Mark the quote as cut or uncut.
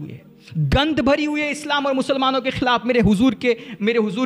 uncut